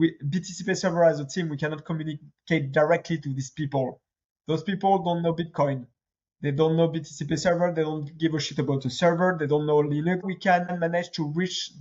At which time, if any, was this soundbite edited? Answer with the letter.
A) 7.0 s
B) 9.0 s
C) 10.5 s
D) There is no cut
C